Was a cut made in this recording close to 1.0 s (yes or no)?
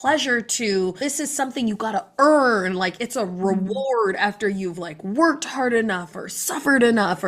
yes